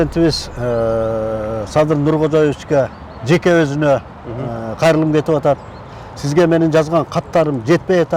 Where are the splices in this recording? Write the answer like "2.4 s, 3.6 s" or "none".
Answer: none